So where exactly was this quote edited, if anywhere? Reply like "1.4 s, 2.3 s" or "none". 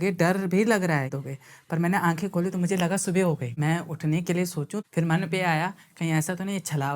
1.1 s, 3.5 s, 4.8 s